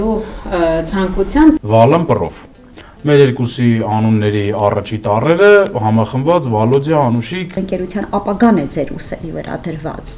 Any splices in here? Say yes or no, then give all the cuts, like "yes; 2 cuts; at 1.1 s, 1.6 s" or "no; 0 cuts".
yes; 2 cuts; at 1.6 s, 7.6 s